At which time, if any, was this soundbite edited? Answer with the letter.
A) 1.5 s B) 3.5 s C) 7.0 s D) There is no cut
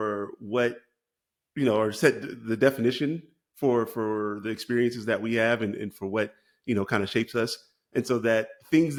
D